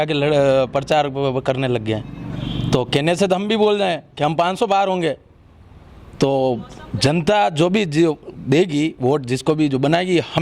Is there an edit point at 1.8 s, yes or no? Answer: no